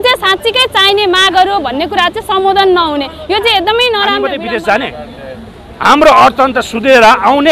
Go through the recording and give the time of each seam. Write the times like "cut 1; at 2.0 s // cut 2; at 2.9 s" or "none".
cut 1; at 4.3 s